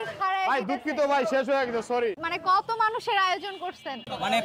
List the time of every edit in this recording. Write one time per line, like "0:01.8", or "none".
0:02.2

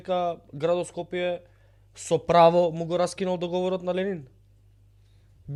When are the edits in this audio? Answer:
none

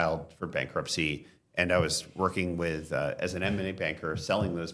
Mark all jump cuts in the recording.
none

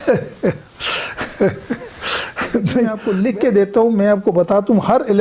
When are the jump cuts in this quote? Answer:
0:03.0

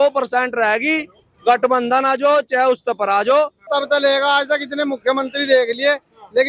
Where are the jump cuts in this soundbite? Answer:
0:03.7

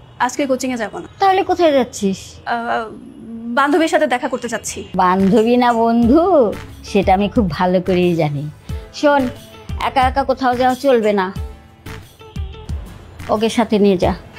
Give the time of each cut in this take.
0:01.0
0:02.3
0:04.8

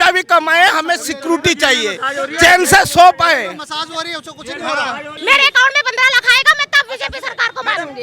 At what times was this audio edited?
0:05.1

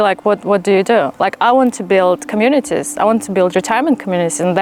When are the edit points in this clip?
none

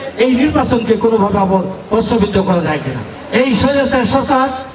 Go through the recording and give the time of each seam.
0:03.1

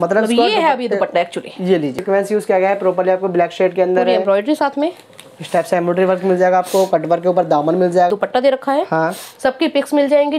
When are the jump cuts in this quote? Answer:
0:02.0
0:08.1

